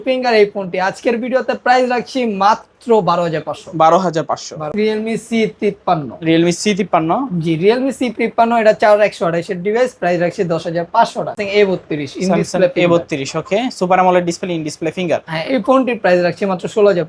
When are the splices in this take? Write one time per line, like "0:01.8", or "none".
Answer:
0:04.7
0:11.3